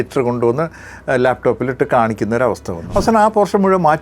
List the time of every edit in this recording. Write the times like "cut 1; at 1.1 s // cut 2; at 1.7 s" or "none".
cut 1; at 2.7 s